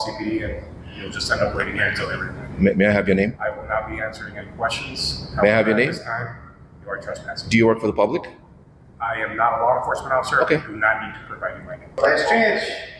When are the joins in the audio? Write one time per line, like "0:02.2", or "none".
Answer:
0:12.0